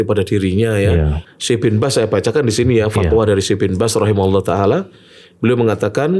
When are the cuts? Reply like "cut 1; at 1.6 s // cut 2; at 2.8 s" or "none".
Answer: cut 1; at 1.2 s